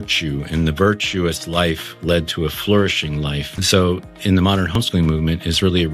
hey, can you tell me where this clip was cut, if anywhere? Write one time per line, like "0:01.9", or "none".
0:03.5
0:04.7